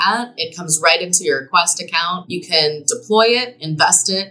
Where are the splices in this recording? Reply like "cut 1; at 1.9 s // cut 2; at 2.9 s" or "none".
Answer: cut 1; at 2.3 s